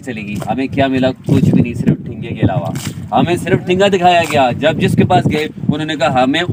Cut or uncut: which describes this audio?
uncut